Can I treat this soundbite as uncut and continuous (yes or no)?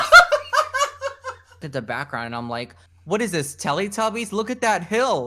no